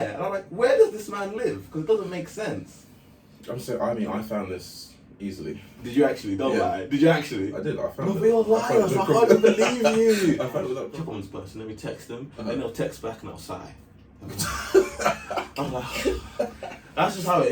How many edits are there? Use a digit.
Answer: 1